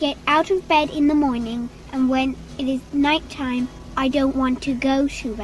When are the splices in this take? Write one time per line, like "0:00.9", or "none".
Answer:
0:02.9
0:03.8